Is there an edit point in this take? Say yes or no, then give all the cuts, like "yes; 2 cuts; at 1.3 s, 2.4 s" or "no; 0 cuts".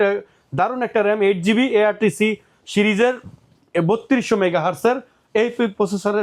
no; 0 cuts